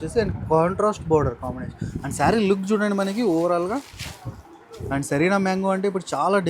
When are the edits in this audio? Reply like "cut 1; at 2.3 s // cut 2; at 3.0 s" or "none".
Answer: none